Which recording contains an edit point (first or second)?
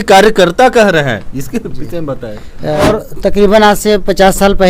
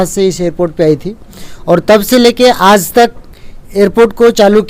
first